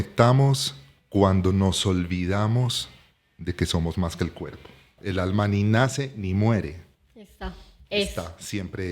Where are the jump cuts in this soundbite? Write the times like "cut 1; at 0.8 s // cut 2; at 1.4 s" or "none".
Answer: cut 1; at 4.9 s